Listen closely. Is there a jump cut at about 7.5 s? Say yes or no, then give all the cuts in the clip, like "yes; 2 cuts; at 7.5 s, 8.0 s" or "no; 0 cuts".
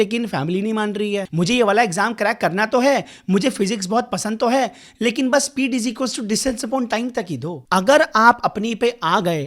yes; 2 cuts; at 1.3 s, 7.5 s